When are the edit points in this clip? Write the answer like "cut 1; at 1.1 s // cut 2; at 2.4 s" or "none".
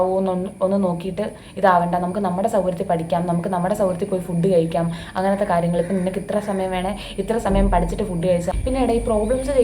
cut 1; at 8.5 s